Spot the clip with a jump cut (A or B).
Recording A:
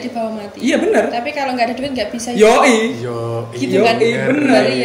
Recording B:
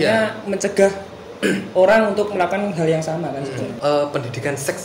B